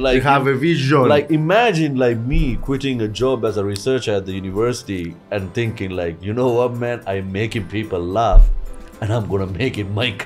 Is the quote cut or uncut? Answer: uncut